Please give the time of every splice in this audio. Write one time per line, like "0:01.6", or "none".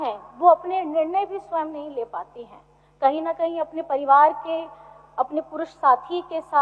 none